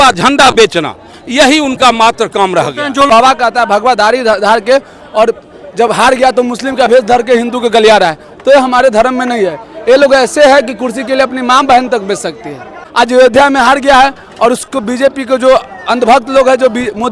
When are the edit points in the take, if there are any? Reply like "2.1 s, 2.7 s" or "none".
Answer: 3.1 s, 12.8 s